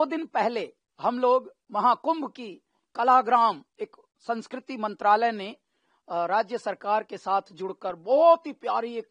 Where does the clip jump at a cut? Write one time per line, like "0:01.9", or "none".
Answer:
none